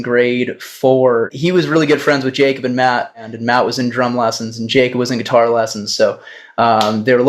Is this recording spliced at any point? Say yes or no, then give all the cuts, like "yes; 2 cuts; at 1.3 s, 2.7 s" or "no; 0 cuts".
yes; 2 cuts; at 1.3 s, 3.3 s